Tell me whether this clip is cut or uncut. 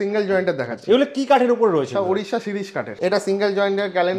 cut